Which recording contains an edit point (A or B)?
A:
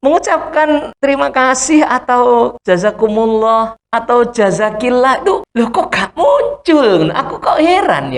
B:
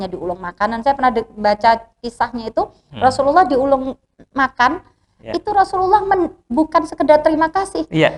A